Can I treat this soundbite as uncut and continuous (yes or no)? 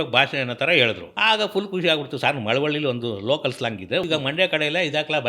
no